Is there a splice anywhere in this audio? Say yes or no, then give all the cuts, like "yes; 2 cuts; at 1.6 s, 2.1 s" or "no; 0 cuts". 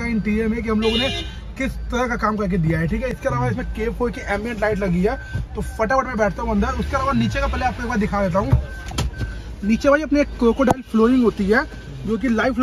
no; 0 cuts